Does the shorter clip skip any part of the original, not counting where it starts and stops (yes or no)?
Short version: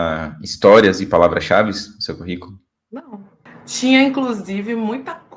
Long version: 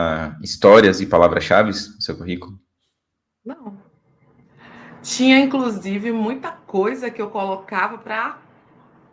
yes